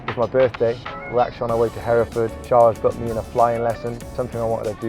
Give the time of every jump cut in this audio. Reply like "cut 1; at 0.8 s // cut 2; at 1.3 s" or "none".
cut 1; at 1.0 s // cut 2; at 2.4 s // cut 3; at 4.1 s